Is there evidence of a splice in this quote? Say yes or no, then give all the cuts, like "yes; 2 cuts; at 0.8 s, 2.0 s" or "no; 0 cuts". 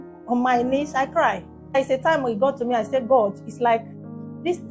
yes; 1 cut; at 1.8 s